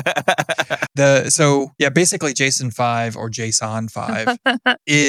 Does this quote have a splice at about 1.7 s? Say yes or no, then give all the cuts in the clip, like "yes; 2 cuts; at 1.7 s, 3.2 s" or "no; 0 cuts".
yes; 2 cuts; at 0.8 s, 1.7 s